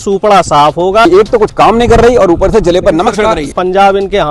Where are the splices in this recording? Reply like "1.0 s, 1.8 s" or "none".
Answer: 1.1 s, 3.5 s